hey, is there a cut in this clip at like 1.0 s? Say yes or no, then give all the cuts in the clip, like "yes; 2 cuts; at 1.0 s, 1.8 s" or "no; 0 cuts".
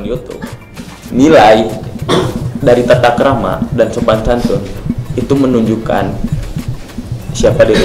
yes; 1 cut; at 1.0 s